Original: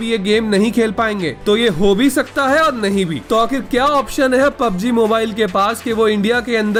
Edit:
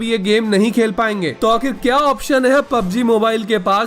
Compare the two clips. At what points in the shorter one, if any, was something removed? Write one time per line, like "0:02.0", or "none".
0:01.3